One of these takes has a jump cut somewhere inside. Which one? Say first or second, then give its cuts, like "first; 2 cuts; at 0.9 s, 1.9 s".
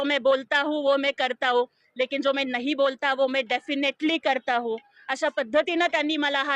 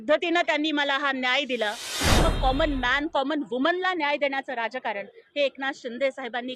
second; 1 cut; at 2.2 s